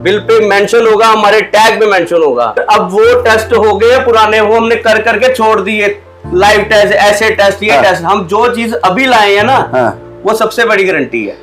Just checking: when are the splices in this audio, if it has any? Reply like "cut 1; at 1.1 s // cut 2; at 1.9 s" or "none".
cut 1; at 2.6 s

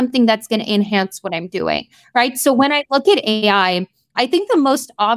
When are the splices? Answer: none

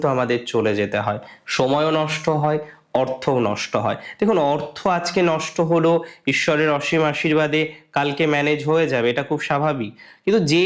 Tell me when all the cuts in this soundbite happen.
none

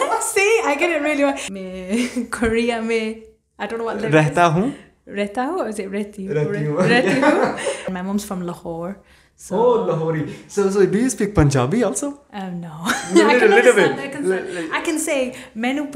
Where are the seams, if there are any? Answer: cut 1; at 1.5 s // cut 2; at 7.9 s

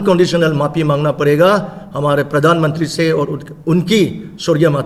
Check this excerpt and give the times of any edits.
none

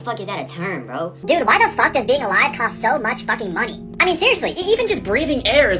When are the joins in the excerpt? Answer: cut 1; at 1.2 s

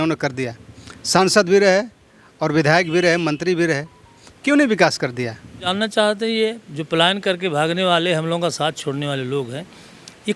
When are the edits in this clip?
cut 1; at 5.7 s

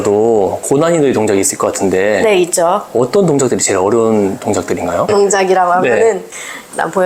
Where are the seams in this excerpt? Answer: none

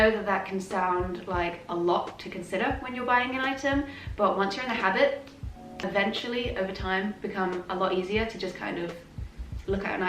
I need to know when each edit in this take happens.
cut 1; at 5.8 s

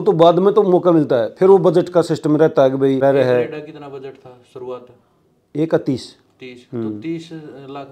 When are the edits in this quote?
cut 1; at 3.0 s

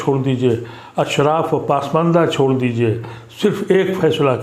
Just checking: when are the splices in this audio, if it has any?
none

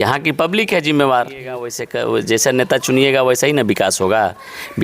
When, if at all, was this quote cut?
cut 1; at 1.8 s

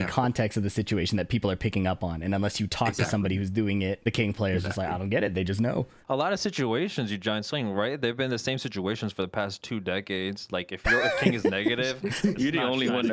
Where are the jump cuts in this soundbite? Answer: cut 1; at 4.0 s // cut 2; at 6.0 s

